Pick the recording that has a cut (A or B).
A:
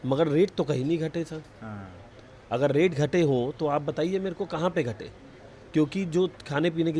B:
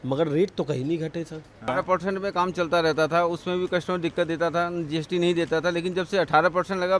B